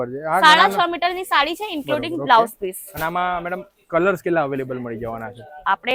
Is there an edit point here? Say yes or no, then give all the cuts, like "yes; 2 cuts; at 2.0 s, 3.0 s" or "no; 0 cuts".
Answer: no; 0 cuts